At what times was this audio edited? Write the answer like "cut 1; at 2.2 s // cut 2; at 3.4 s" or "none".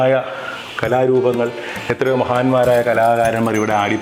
none